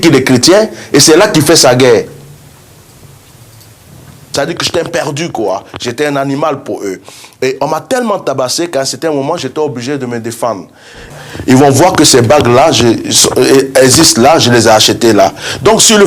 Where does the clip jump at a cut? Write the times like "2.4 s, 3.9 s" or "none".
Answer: 4.2 s, 11.1 s